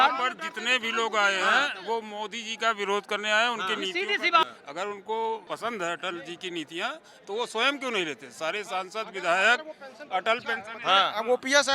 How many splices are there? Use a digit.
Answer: 2